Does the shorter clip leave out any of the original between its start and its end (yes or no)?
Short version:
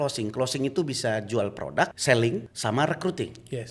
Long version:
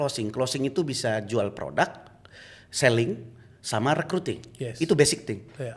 yes